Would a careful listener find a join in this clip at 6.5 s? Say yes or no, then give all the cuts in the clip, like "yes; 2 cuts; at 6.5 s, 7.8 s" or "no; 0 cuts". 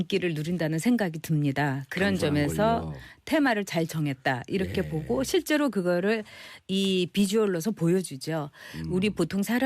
no; 1 cut; at 8.0 s